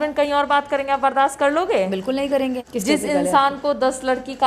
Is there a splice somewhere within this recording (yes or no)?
yes